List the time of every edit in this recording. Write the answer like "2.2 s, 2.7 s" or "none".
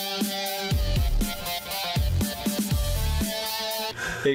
none